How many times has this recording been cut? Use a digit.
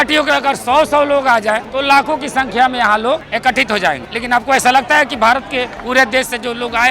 4